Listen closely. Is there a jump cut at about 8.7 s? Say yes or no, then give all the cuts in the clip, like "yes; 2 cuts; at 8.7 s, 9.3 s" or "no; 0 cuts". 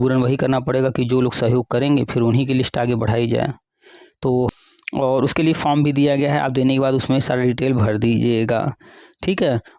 no; 1 cut; at 4.5 s